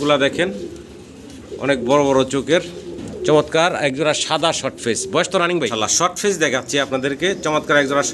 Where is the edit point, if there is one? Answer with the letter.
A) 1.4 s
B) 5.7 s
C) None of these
B